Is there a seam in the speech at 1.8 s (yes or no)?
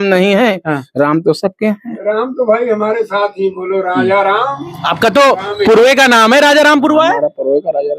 no